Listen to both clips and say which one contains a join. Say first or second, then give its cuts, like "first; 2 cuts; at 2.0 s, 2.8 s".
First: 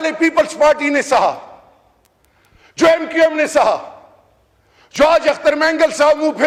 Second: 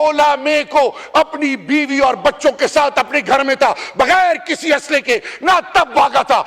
second; 1 cut; at 5.1 s